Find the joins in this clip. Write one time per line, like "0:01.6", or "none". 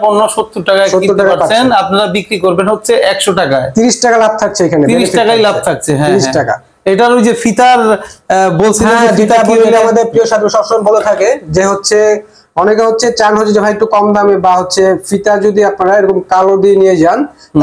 none